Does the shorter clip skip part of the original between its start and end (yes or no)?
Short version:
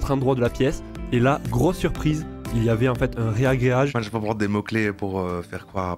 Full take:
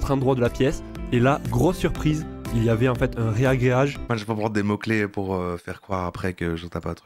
yes